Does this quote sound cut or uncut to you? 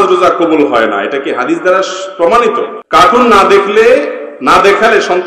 cut